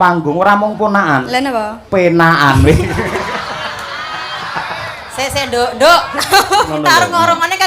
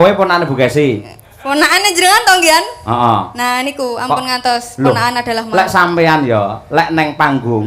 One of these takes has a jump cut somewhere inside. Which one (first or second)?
first